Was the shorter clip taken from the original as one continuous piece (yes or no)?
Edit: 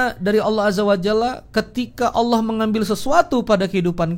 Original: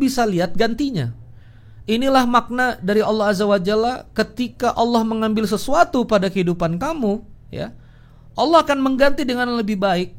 yes